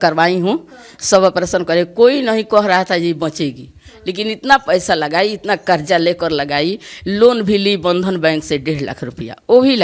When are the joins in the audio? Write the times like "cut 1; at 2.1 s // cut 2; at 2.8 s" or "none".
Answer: none